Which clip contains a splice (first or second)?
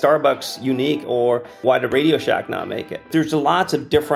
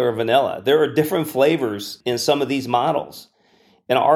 first